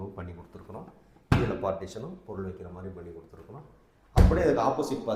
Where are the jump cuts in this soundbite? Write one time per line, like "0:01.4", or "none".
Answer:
none

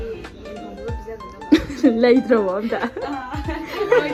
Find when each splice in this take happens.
none

